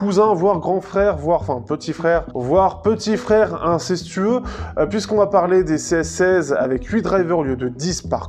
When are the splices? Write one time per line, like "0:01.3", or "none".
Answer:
0:02.3